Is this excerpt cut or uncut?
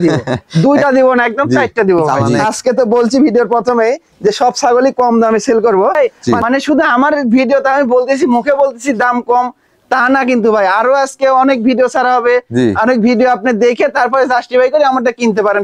cut